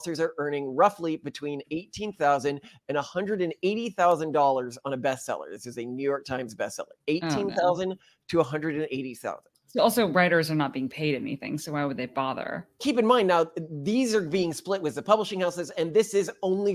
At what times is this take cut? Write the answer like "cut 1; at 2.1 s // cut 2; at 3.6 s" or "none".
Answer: none